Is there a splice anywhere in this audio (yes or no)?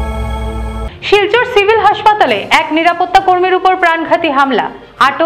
yes